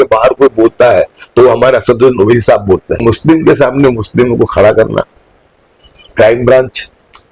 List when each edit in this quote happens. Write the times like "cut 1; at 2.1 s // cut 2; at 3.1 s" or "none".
cut 1; at 3.0 s